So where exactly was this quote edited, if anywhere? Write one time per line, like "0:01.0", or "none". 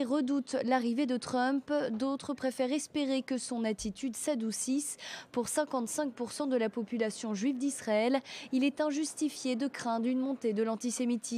0:04.2